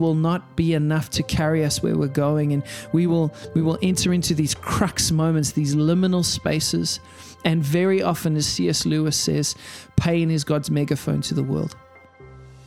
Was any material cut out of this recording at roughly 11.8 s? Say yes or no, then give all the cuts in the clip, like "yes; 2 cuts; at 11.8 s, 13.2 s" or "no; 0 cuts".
yes; 1 cut; at 11.8 s